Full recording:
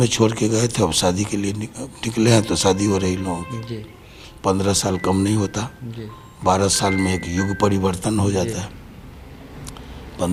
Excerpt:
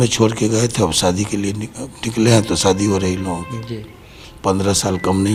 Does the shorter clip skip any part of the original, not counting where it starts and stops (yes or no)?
no